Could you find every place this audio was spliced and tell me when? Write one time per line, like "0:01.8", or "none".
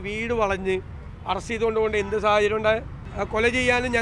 0:03.1